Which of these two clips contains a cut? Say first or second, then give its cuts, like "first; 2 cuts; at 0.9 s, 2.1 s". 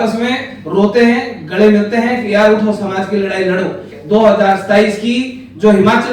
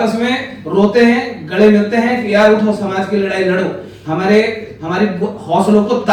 first; 1 cut; at 3.9 s